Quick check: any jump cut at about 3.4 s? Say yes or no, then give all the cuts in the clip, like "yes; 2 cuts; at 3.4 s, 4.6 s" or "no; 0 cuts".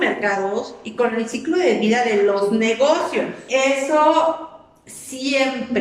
yes; 1 cut; at 3.4 s